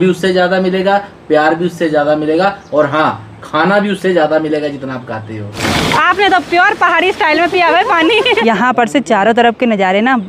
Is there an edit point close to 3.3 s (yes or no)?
no